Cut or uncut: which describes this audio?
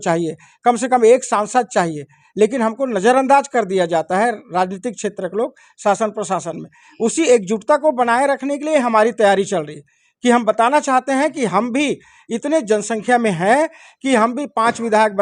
uncut